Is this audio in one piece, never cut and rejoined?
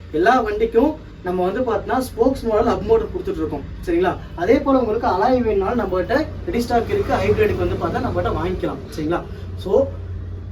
yes; 0 cuts

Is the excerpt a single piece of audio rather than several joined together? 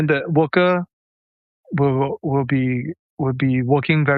yes; 0 cuts

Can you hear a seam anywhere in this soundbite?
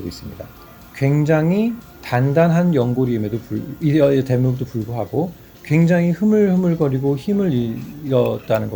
no; 0 cuts

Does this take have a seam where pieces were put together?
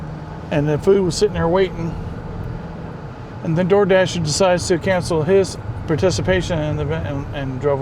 no; 0 cuts

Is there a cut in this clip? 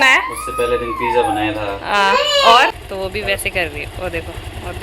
yes; 1 cut; at 2.7 s

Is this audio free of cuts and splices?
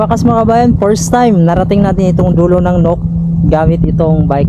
yes; 0 cuts

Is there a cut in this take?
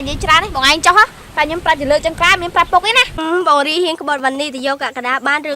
yes; 1 cut; at 3.2 s

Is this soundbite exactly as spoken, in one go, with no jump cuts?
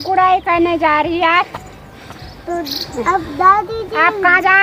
yes; 0 cuts

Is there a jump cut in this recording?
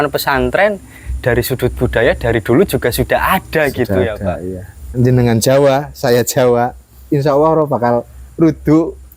yes; 1 cut; at 4.9 s

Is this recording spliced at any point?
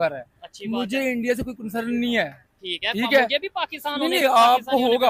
no; 0 cuts

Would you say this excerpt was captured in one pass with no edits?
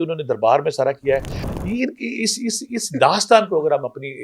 yes; 0 cuts

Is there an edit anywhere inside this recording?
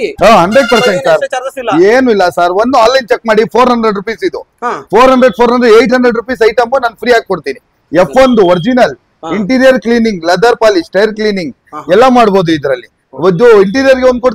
no; 0 cuts

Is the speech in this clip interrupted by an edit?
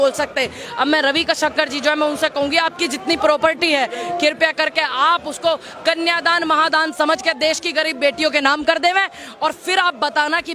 no; 0 cuts

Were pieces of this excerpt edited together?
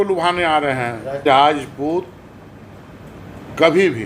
yes; 1 cut; at 1.2 s

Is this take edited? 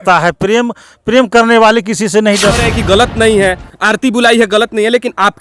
yes; 1 cut; at 2.6 s

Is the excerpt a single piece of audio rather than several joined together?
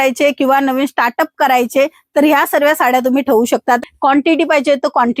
no; 1 cut; at 3.8 s

